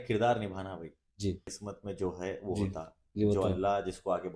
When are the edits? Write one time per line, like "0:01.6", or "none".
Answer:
0:01.6